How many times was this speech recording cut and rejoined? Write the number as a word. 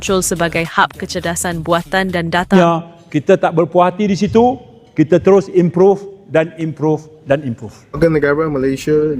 two